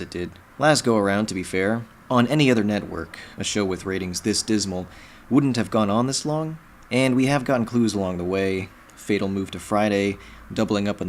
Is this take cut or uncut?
cut